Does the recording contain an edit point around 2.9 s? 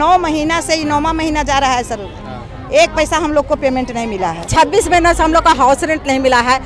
no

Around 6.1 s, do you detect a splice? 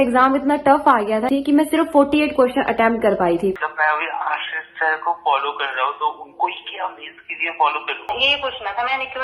no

